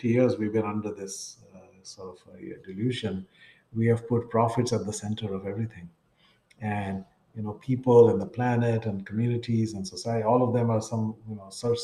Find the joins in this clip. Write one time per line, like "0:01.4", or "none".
none